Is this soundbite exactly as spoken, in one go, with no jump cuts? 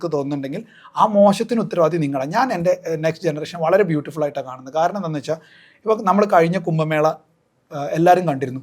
yes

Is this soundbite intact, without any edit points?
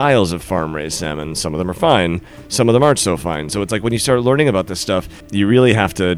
no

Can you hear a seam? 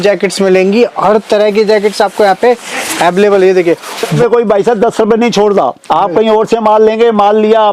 yes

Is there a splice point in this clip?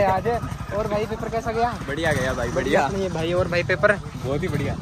no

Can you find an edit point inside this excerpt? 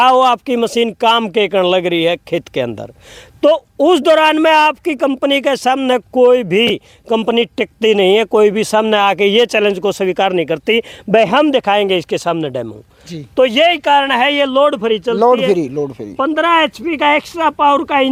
no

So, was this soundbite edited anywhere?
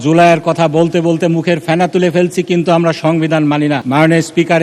no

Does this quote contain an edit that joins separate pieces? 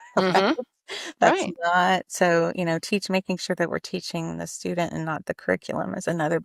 no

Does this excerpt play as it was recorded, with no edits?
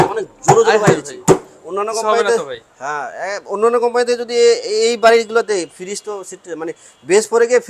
yes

